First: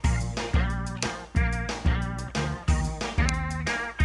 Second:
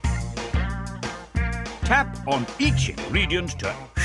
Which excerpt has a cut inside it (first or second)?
first